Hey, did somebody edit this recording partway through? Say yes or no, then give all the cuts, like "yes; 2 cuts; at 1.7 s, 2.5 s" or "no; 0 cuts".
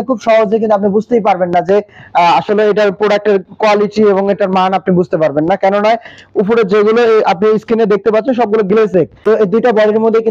yes; 1 cut; at 9.2 s